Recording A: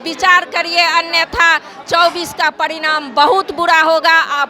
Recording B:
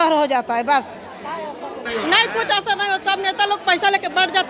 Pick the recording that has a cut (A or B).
B